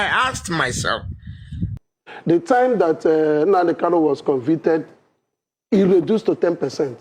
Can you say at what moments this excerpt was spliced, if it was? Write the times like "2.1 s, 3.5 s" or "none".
1.8 s